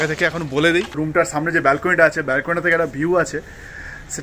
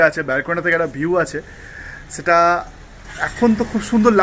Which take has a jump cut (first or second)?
first